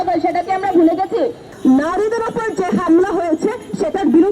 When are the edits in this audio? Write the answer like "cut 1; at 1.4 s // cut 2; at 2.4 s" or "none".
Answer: cut 1; at 1.5 s